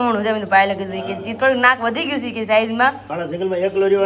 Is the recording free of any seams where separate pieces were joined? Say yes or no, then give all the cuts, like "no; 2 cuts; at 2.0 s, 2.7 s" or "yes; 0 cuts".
no; 1 cut; at 3.1 s